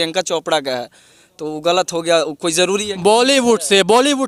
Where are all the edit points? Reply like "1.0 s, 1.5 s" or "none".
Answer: none